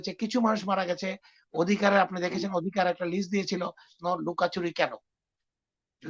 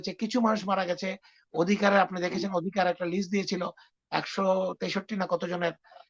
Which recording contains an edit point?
first; 1 cut; at 3.9 s

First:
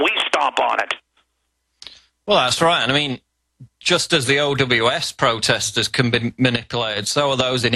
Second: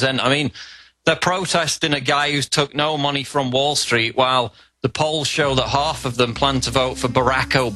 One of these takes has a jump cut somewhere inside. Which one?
first; 1 cut; at 2.1 s

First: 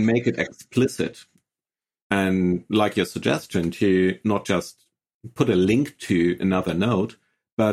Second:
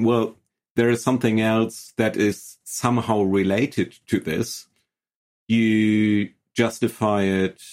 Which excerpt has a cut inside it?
first; 1 cut; at 2.0 s

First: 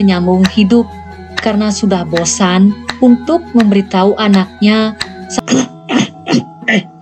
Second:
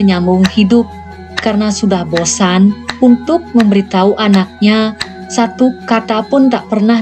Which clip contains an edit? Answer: first; 1 cut; at 5.3 s

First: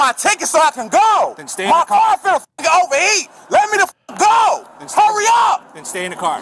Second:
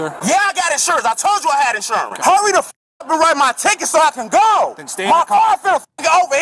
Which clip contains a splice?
second; 1 cut; at 2.1 s

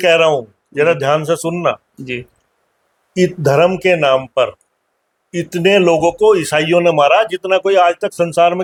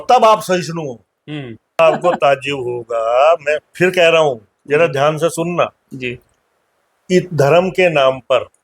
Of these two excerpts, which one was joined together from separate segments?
second; 1 cut; at 1.8 s

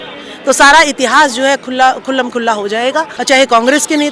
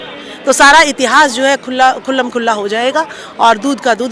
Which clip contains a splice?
first; 1 cut; at 3.1 s

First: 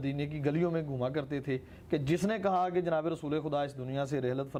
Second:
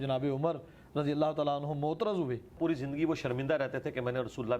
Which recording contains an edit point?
second; 1 cut; at 2.6 s

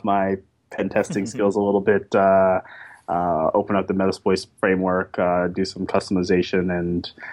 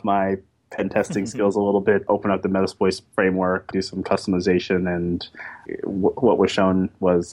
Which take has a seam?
second; 3 cuts; at 2.1 s, 3.7 s, 5.6 s

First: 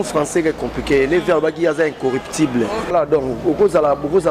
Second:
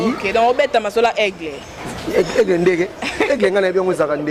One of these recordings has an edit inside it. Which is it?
first; 1 cut; at 2.9 s

